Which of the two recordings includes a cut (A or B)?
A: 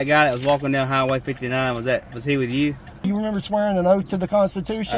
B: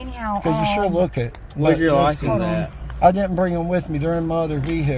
A